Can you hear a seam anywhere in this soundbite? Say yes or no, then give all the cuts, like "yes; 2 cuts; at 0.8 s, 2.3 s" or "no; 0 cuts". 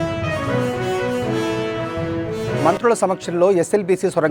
yes; 1 cut; at 2.5 s